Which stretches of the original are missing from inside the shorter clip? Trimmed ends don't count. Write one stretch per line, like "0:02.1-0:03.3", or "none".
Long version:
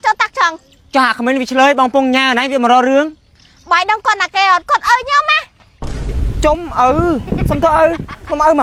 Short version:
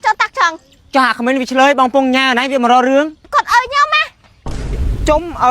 0:03.3-0:04.6